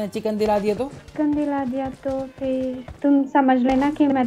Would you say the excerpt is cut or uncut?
cut